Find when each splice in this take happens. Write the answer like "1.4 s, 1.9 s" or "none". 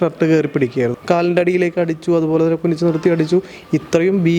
1.0 s